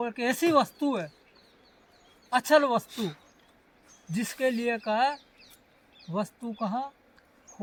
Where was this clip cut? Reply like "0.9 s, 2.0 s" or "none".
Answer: none

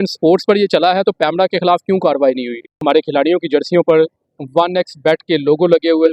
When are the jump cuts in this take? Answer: 2.8 s

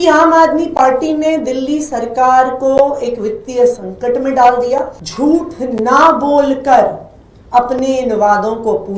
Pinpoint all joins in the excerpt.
5.0 s

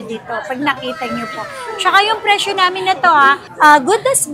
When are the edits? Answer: 3.4 s

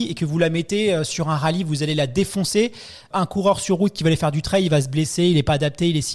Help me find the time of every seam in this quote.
3.1 s

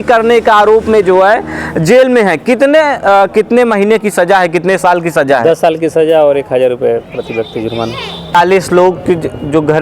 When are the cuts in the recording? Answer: 8.3 s

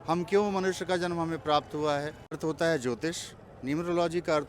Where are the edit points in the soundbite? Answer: 2.4 s

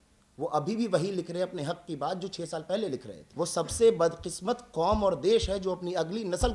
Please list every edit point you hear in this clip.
3.2 s

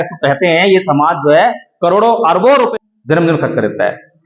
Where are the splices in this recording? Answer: 2.7 s

